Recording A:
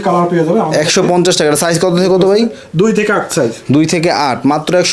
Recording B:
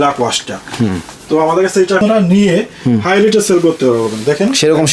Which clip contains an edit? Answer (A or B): B